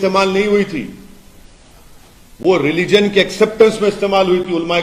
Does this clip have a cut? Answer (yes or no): no